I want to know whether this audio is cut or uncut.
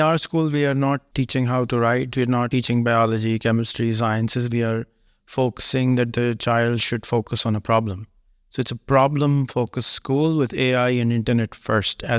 cut